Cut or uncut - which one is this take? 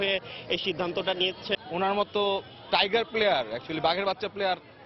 cut